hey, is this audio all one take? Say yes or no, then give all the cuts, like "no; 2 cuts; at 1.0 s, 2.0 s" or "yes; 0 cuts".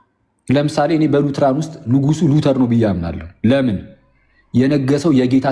yes; 0 cuts